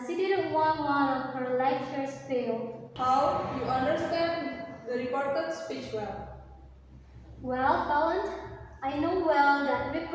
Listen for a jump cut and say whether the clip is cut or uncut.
cut